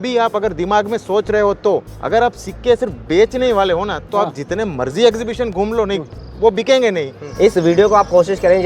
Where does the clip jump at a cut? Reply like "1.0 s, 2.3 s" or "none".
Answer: 1.9 s, 7.2 s